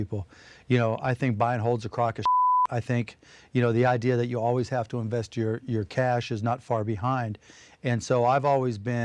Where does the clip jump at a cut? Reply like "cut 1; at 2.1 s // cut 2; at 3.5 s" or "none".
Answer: none